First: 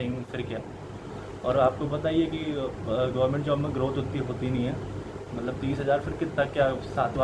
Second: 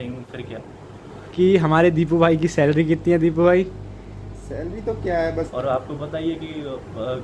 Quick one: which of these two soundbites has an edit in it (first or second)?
second